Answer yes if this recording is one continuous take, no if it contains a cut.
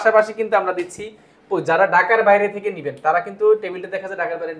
yes